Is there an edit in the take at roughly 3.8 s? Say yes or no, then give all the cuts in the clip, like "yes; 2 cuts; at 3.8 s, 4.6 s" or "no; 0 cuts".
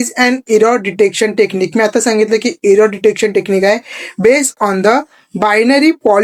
no; 0 cuts